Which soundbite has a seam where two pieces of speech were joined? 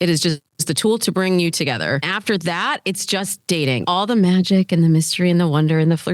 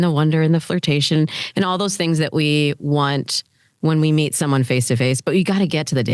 first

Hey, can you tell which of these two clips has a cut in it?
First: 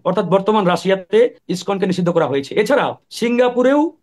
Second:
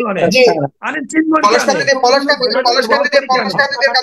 first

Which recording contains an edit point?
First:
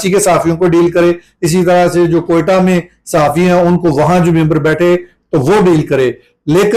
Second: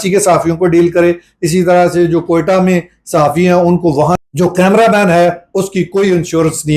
second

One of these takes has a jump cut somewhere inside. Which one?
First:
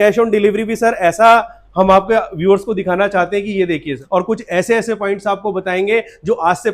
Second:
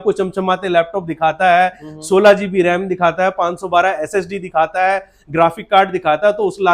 first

